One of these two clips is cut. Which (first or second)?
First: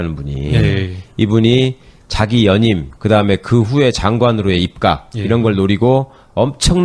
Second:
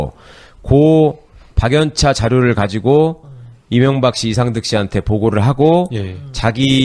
first